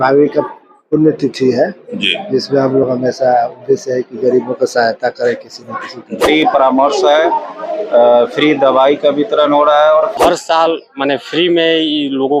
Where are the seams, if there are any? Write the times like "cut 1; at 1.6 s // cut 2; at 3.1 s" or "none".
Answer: cut 1; at 6.2 s // cut 2; at 10.1 s